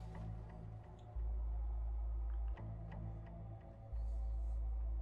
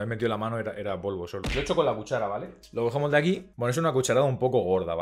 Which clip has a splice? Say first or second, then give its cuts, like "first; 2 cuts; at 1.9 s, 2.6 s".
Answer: second; 1 cut; at 3.5 s